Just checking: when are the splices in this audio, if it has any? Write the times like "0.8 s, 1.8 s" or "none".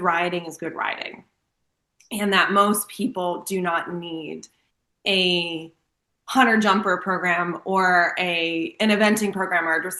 none